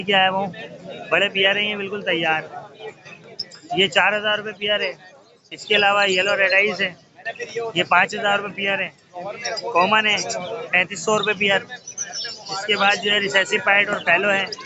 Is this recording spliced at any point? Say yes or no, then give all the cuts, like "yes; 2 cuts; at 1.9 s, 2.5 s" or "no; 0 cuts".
no; 0 cuts